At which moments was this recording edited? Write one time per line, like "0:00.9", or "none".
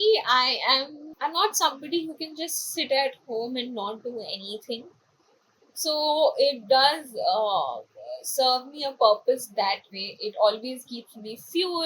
0:01.0